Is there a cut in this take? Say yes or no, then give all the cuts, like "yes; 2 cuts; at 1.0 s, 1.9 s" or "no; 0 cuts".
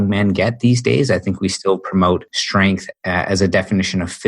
yes; 1 cut; at 2.4 s